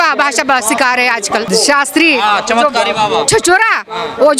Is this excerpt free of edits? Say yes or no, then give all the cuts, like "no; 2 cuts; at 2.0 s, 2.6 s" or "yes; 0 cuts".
no; 1 cut; at 1.5 s